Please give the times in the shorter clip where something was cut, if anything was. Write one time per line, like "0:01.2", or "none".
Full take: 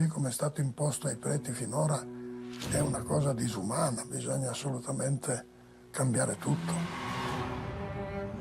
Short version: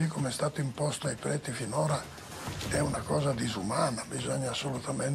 none